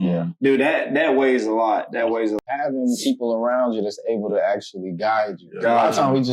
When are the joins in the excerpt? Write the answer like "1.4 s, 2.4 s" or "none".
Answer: 2.4 s